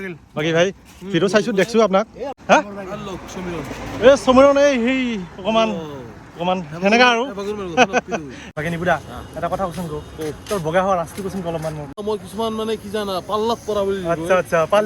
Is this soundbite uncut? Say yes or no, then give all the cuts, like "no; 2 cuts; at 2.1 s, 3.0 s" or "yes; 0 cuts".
no; 3 cuts; at 2.4 s, 8.4 s, 12.0 s